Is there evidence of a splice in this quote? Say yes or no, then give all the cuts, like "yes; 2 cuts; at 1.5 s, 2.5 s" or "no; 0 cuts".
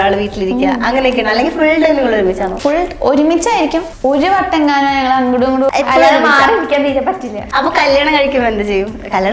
yes; 4 cuts; at 2.5 s, 3.9 s, 5.7 s, 7.4 s